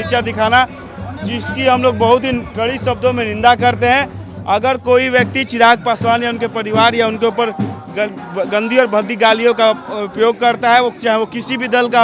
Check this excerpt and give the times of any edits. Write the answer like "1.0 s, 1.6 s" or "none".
none